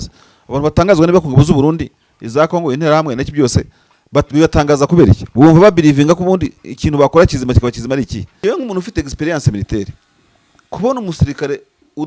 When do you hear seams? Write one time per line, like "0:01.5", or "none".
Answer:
0:08.2